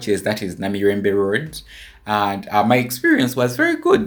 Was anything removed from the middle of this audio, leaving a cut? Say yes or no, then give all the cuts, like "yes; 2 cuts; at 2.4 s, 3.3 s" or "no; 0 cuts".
no; 0 cuts